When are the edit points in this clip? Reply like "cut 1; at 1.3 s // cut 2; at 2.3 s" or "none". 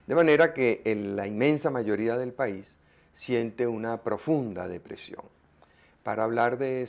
cut 1; at 1.7 s